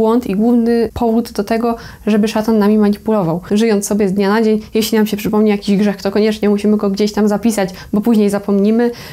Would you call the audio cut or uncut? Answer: cut